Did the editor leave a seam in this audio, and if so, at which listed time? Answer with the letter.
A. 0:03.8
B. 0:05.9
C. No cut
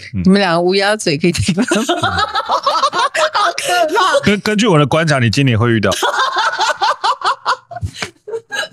B